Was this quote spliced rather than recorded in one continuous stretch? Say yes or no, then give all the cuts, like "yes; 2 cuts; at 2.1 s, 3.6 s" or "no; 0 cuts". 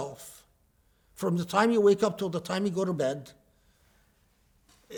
no; 0 cuts